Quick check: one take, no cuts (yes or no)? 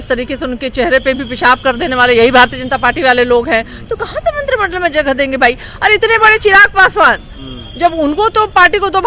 yes